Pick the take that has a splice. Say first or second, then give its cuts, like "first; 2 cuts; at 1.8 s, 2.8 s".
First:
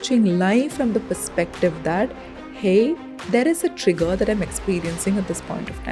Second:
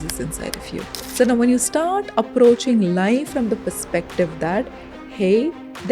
second; 1 cut; at 1.0 s